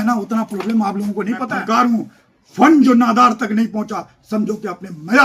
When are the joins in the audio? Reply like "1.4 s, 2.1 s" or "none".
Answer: 1.5 s